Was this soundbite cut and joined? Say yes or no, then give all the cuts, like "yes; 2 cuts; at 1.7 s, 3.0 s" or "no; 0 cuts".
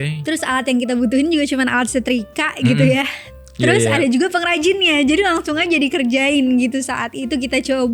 no; 0 cuts